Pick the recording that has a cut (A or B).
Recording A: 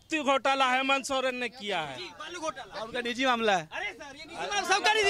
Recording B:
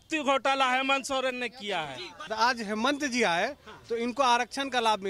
B